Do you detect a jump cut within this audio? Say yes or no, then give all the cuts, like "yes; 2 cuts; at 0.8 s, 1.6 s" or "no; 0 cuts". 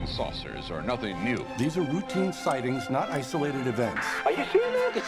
yes; 1 cut; at 4.0 s